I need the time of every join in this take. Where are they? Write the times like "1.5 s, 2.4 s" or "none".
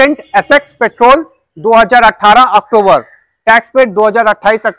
none